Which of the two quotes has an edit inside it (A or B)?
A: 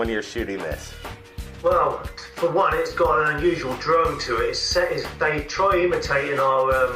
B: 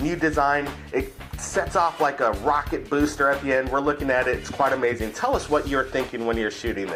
A